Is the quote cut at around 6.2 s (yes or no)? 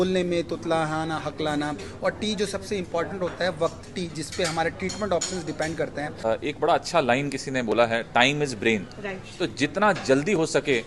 yes